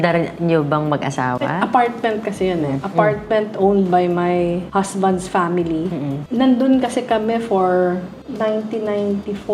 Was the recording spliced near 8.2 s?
no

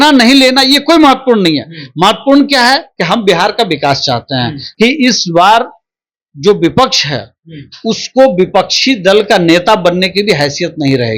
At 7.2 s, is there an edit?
no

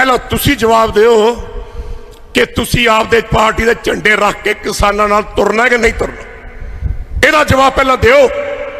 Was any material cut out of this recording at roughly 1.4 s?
no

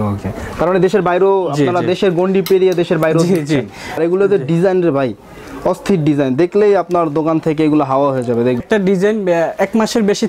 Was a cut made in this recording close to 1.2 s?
no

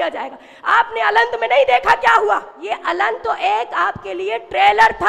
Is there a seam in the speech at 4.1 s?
no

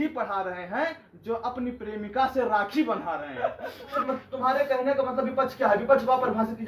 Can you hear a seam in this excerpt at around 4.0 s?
yes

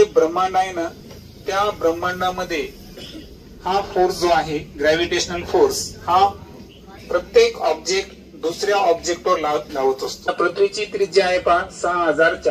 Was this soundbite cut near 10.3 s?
yes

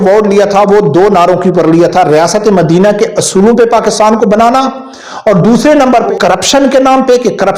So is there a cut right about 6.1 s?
yes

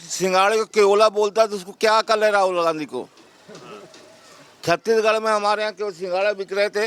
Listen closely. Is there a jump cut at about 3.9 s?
no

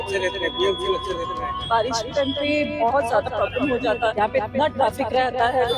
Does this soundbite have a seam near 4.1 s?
yes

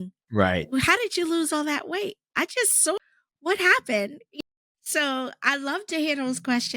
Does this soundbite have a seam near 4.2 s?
yes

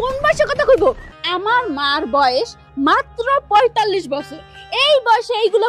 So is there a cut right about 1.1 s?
yes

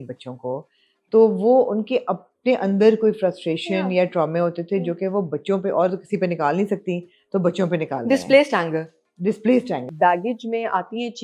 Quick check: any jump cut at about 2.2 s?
no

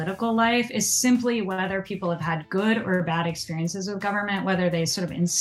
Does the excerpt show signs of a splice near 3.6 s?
no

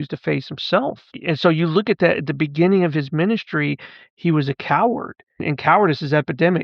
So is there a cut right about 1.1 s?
yes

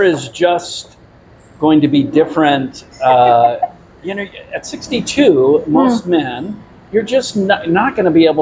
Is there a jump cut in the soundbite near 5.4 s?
no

